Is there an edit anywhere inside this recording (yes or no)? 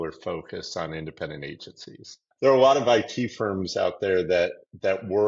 yes